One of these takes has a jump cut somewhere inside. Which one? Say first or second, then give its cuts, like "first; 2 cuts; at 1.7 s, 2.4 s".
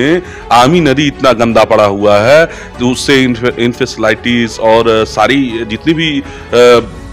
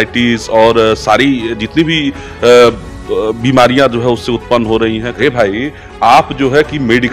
second; 1 cut; at 5.1 s